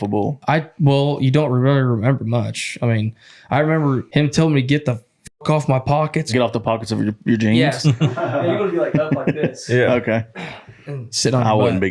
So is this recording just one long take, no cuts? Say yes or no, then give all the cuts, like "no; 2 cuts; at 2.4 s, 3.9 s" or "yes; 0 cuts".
no; 4 cuts; at 4.0 s, 6.3 s, 7.8 s, 11.1 s